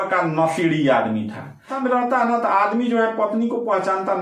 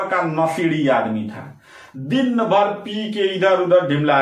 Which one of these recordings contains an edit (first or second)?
first